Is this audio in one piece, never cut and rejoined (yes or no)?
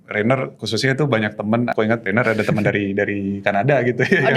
no